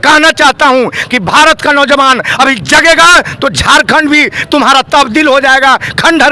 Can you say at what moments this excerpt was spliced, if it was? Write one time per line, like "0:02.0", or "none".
none